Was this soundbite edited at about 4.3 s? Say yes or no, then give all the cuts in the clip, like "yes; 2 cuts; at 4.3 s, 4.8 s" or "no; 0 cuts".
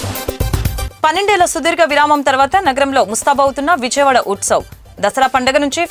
no; 1 cut; at 0.9 s